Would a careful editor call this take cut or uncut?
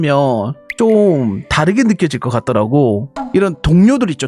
cut